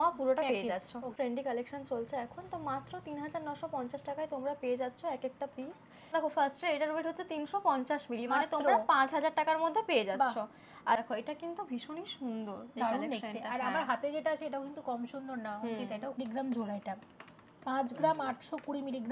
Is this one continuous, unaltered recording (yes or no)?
no